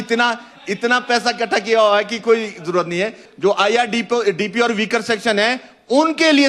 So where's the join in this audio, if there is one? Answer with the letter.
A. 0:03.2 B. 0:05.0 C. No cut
A